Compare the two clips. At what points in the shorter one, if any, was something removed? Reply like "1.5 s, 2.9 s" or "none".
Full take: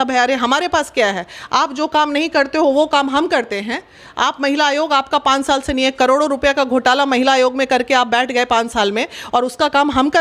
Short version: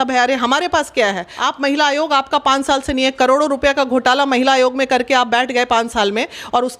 1.3 s